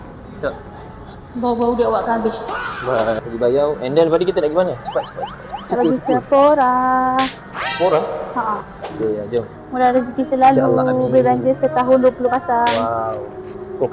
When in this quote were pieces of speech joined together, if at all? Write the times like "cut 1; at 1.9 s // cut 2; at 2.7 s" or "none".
cut 1; at 3.2 s // cut 2; at 8.9 s